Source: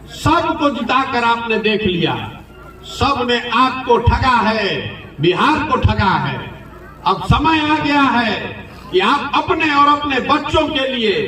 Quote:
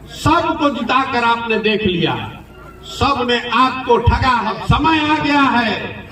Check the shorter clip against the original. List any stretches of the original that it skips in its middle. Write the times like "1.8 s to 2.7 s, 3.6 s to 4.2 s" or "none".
4.5 s to 7.1 s